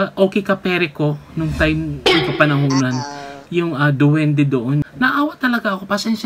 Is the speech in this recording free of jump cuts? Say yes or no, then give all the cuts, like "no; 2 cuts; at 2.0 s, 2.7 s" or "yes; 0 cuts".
no; 1 cut; at 4.8 s